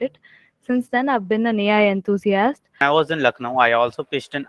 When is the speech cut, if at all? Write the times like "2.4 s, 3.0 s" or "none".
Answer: 2.8 s